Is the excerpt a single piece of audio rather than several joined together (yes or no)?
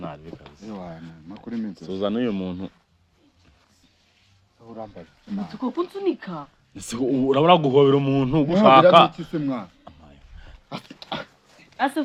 yes